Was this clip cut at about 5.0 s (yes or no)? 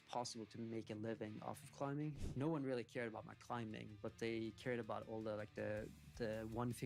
no